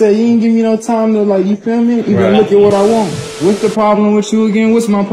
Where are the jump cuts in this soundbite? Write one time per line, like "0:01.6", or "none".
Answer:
0:03.2